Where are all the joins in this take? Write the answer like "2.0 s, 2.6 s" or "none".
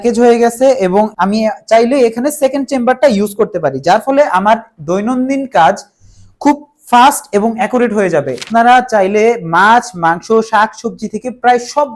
1.1 s, 8.4 s